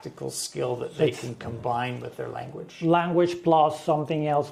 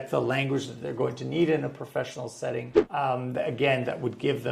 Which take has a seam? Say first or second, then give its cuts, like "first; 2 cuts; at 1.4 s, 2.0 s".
second; 1 cut; at 2.8 s